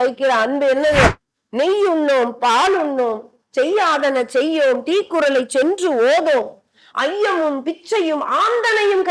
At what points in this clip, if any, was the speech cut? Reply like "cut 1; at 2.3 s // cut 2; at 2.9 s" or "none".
cut 1; at 1.1 s